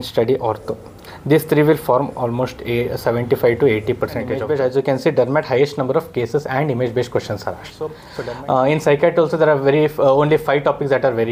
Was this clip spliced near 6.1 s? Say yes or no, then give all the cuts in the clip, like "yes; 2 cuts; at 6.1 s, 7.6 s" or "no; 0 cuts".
no; 2 cuts; at 4.4 s, 8.1 s